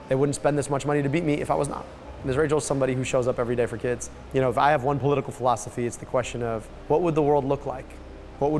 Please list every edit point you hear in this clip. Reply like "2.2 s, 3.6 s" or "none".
2.2 s, 4.1 s, 6.7 s